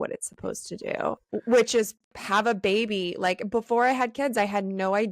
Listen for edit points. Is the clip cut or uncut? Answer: cut